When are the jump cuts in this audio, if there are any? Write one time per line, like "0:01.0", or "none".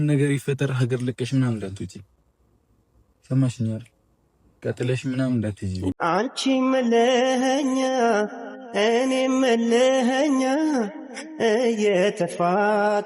0:05.9